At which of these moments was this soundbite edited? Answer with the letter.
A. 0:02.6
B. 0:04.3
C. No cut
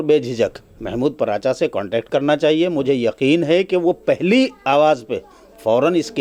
C